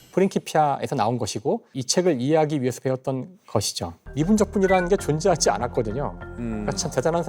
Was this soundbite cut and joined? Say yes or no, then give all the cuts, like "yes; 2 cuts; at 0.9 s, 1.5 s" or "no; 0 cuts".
yes; 1 cut; at 4.0 s